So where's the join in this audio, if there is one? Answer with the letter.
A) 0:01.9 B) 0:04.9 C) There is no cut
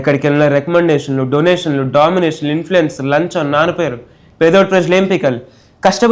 C